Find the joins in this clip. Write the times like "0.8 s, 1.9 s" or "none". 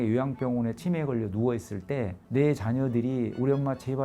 2.2 s